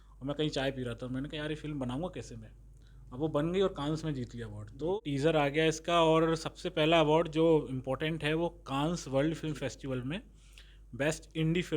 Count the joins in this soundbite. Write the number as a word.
one